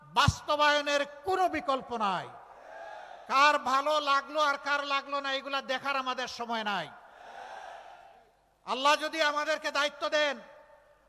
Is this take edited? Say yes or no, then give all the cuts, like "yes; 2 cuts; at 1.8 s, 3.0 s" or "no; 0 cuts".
yes; 1 cut; at 6.6 s